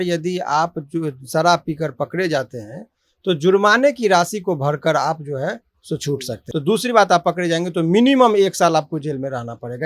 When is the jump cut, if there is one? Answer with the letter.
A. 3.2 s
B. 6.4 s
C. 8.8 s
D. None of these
B